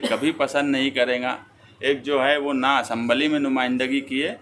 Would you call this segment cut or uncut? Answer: uncut